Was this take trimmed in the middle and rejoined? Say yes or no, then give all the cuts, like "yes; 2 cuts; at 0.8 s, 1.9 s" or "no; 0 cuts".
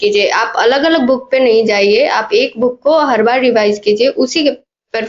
no; 0 cuts